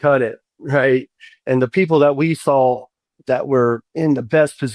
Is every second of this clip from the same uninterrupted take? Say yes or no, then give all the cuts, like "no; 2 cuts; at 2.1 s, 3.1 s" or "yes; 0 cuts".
no; 1 cut; at 1.4 s